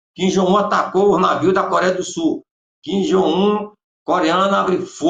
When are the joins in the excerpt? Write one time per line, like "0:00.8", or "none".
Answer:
none